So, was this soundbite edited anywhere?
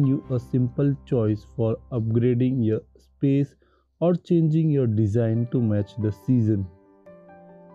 no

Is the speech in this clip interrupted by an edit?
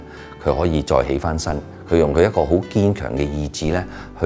no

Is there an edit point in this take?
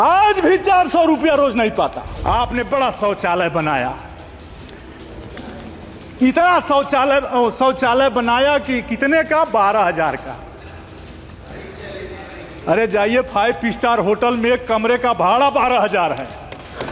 yes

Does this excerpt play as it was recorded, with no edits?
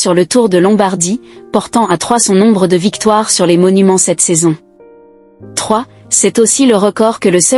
yes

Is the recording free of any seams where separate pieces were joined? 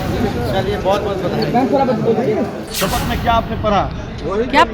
no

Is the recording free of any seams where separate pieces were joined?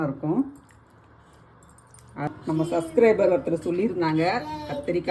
no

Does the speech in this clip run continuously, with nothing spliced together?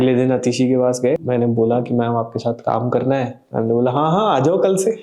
no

